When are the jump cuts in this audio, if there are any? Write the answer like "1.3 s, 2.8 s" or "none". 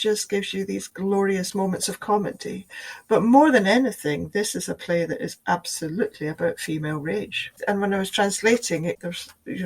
1.5 s, 7.5 s